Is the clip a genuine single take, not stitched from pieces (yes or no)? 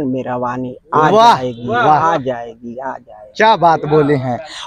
yes